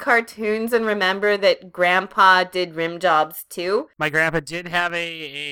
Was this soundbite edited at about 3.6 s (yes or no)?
yes